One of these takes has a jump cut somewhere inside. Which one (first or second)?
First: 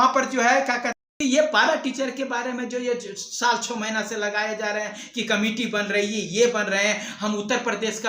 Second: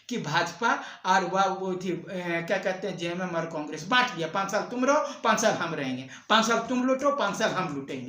first